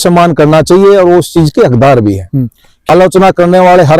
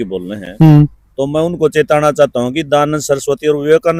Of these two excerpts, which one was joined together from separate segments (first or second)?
first